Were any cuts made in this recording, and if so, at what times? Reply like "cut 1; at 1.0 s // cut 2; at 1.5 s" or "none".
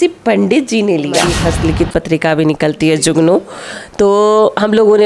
cut 1; at 1.4 s